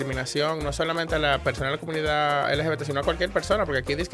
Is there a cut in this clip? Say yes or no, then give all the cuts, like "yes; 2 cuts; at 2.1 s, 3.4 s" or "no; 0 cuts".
no; 0 cuts